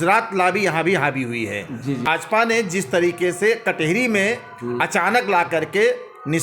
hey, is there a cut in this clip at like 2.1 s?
yes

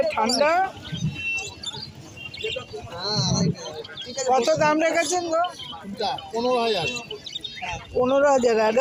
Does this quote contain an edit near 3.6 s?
no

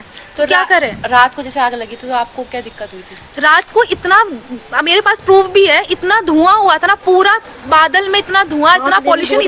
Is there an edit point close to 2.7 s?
no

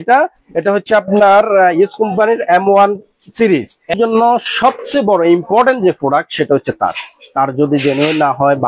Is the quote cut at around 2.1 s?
no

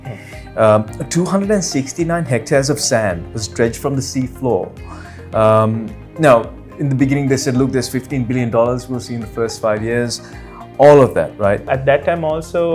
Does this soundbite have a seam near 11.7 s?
yes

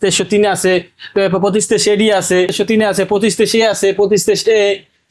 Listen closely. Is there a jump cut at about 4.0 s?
no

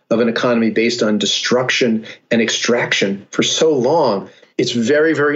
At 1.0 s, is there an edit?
no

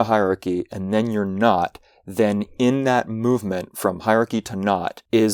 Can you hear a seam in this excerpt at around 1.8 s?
no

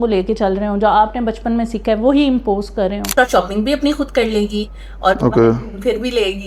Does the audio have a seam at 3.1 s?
yes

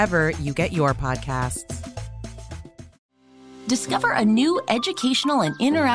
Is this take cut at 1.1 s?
no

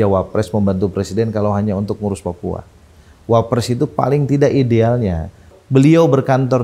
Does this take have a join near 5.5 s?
yes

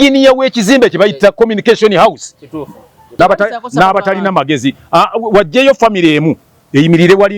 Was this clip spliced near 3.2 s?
yes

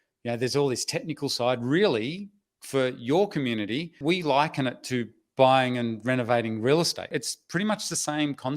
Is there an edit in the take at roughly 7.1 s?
yes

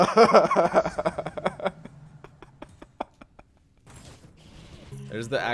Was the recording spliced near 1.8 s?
no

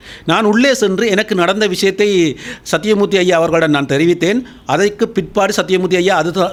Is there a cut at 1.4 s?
no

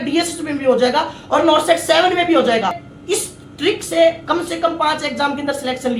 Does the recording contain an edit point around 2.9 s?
yes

